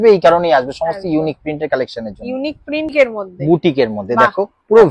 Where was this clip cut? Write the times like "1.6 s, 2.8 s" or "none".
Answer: 2.9 s